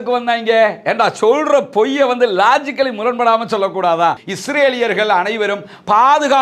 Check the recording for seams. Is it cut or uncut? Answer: cut